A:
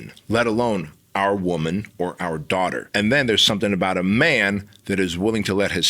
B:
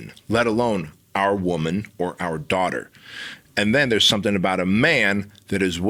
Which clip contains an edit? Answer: A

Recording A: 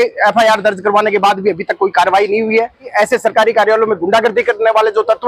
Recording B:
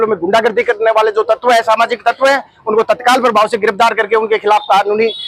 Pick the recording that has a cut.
A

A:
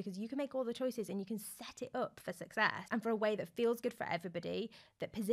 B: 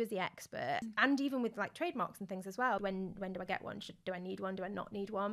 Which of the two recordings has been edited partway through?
B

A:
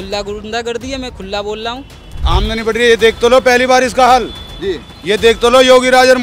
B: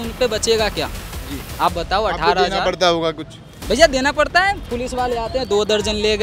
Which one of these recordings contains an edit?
A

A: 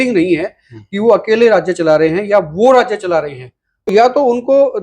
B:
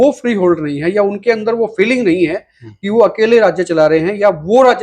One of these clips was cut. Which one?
A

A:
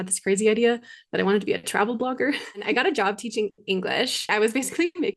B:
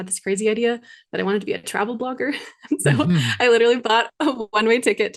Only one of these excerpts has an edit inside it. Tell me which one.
A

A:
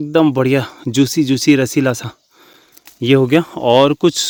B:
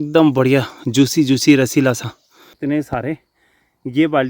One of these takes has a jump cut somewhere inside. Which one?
B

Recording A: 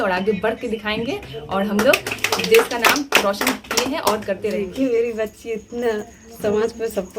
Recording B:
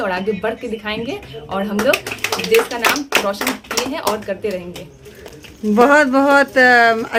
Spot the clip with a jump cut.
A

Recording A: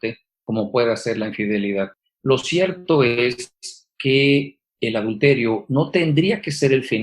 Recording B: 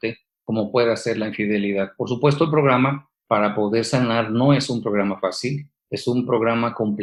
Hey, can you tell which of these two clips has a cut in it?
A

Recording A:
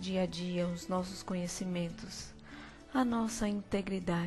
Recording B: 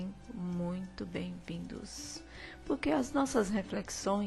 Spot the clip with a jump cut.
A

